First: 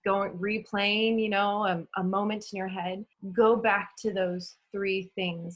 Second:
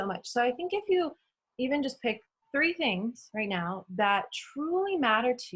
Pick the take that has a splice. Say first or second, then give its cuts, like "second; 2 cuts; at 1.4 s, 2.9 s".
first; 1 cut; at 3.1 s